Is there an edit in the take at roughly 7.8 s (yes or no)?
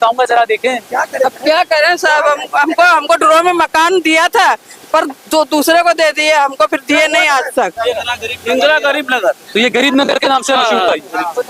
yes